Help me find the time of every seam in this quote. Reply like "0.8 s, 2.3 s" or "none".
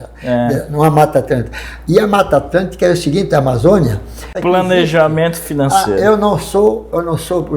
4.3 s